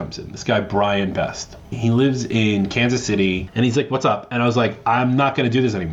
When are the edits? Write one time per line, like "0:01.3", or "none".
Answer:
0:01.7
0:03.4